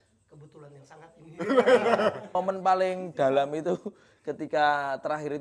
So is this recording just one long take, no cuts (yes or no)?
no